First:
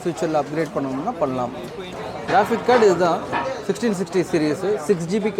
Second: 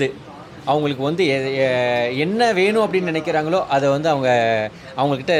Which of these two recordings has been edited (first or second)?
first